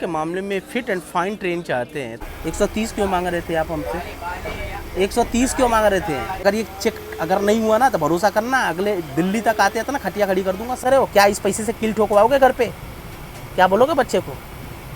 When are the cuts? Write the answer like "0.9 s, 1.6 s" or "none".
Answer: 2.1 s, 6.4 s, 10.8 s